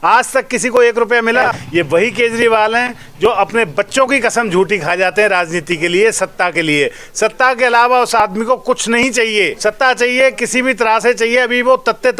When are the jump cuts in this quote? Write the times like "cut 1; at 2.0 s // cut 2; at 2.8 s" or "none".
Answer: cut 1; at 1.4 s // cut 2; at 9.7 s